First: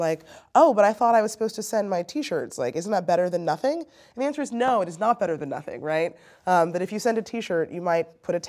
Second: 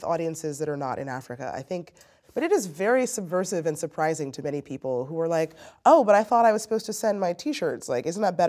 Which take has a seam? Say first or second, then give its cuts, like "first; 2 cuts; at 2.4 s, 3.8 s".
second; 1 cut; at 2.2 s